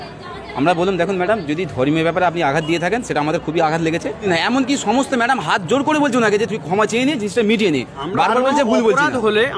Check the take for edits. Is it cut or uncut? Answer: cut